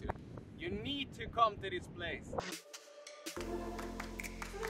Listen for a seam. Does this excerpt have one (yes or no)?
yes